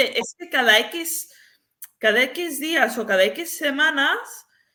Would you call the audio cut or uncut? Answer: uncut